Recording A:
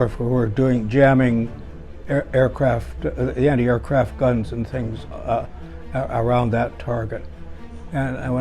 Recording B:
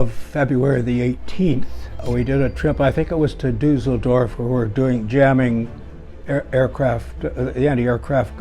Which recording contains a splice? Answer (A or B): B